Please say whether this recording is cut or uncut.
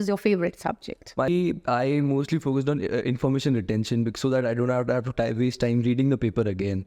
cut